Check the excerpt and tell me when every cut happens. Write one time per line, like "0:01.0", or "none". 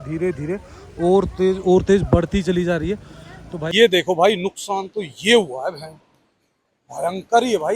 0:03.7